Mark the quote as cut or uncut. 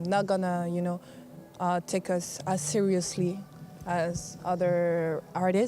uncut